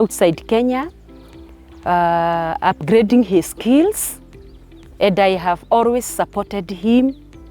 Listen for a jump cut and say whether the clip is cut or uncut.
uncut